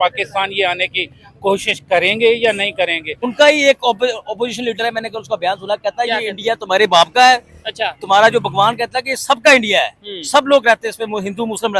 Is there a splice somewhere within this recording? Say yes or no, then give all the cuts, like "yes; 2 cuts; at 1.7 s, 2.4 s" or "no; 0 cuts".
yes; 1 cut; at 3.1 s